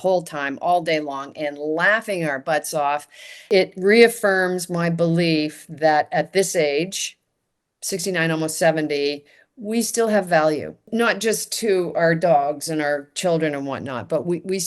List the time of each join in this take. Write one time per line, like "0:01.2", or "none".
0:03.5
0:10.9